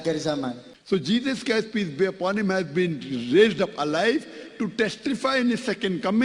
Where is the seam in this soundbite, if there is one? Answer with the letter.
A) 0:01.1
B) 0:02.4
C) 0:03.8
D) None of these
A